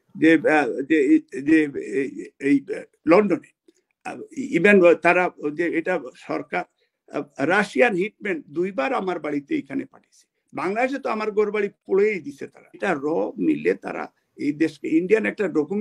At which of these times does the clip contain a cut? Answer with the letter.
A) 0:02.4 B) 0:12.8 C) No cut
B